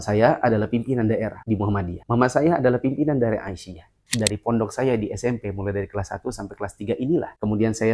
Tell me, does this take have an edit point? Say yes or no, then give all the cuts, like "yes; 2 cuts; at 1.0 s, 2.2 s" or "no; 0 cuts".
yes; 1 cut; at 4.1 s